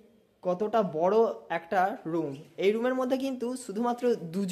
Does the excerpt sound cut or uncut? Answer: uncut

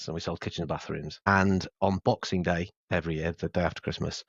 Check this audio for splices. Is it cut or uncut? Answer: cut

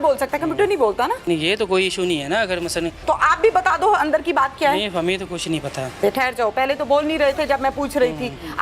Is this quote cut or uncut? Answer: cut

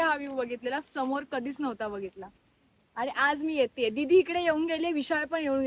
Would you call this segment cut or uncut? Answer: uncut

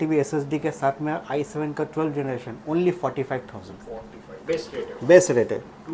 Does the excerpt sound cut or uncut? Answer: uncut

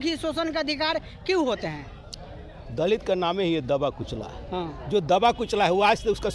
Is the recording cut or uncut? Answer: uncut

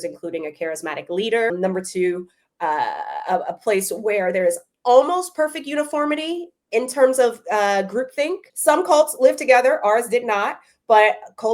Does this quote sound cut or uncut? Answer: cut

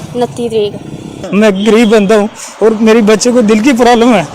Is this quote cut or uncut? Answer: cut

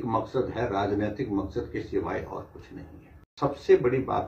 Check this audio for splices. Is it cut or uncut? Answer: cut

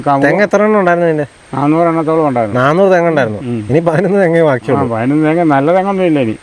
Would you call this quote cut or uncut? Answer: uncut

